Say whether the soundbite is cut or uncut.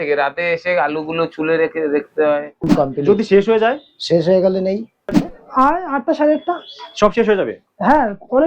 cut